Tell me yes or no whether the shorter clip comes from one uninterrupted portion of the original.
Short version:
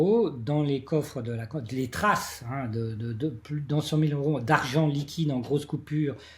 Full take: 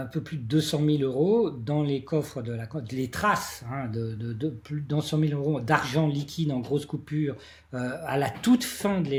yes